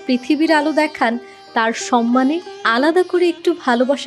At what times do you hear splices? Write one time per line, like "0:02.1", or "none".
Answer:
0:01.3

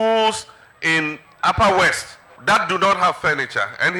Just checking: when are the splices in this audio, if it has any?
none

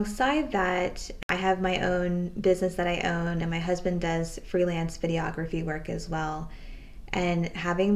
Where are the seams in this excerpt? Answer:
0:01.1

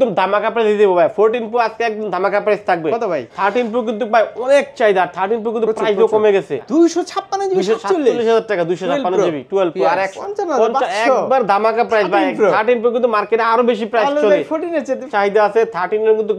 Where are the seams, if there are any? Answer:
0:03.3
0:06.6
0:10.2
0:15.1

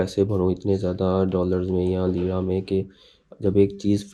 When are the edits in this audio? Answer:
none

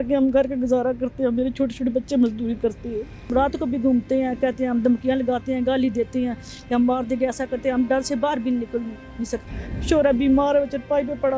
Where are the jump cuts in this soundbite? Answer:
0:03.1
0:09.4

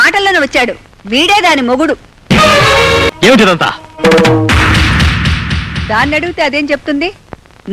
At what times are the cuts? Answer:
0:03.1

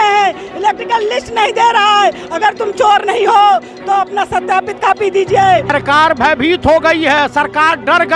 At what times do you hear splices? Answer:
0:05.7

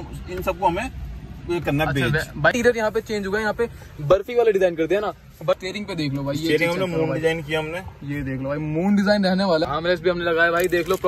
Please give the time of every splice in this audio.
0:02.5
0:05.6
0:09.6

